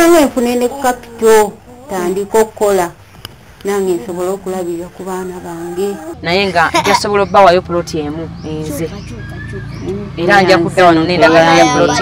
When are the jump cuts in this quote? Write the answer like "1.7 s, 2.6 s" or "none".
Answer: 6.1 s